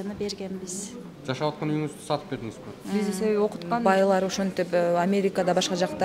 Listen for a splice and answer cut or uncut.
cut